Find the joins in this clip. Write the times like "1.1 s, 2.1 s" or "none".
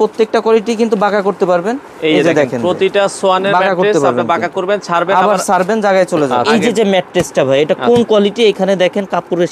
6.3 s